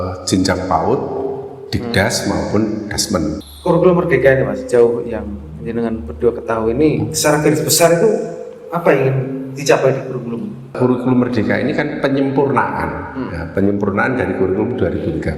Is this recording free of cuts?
no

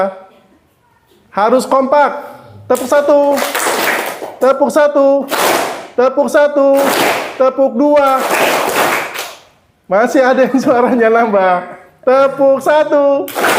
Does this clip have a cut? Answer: no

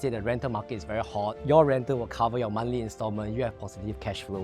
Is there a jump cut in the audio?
yes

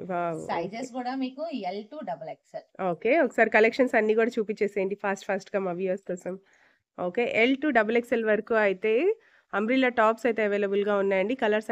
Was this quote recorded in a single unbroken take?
yes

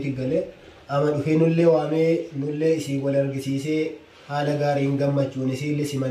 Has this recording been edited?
no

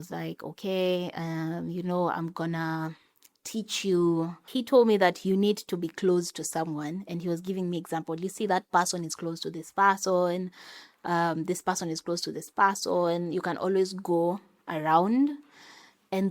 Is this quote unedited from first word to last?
no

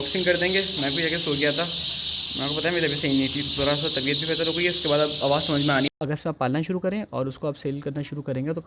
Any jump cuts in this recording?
yes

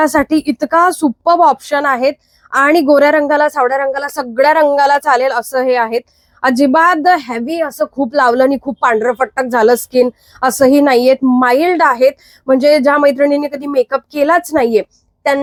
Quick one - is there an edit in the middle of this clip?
no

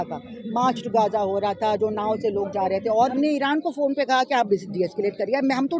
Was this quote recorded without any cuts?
no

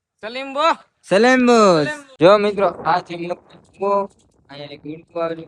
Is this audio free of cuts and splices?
no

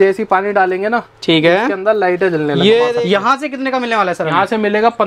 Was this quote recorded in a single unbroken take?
no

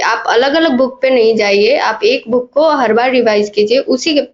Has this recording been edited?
no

